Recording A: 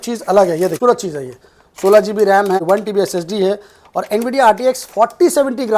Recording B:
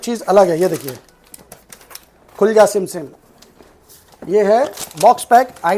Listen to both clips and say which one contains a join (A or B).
A